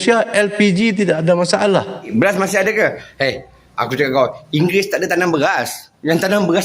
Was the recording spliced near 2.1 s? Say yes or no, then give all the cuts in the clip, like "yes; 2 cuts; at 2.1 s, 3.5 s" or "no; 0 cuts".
yes; 1 cut; at 2.1 s